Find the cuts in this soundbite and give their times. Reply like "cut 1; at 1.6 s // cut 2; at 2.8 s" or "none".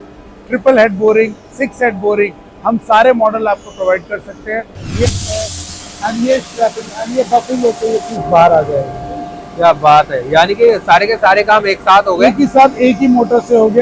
cut 1; at 5.1 s